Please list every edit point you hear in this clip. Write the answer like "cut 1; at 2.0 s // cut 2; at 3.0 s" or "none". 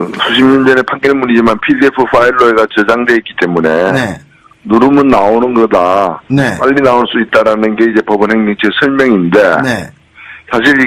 cut 1; at 8.7 s